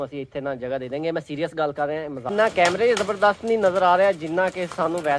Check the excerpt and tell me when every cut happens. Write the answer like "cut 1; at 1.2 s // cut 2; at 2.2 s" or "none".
cut 1; at 2.3 s